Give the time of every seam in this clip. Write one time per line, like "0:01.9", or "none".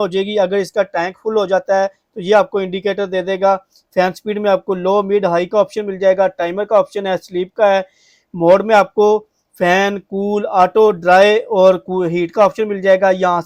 none

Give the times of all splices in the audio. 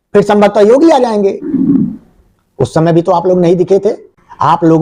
0:01.4

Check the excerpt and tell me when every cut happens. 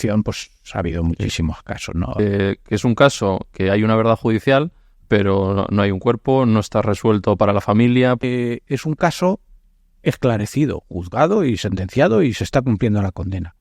0:02.2
0:08.2

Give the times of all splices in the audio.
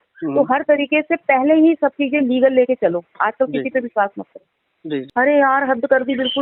0:05.1

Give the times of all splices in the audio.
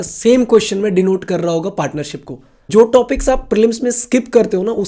0:02.7

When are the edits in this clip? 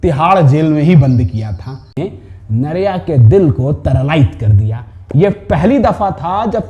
0:02.0

